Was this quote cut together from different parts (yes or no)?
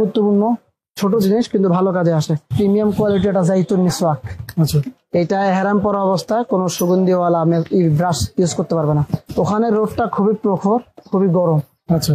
yes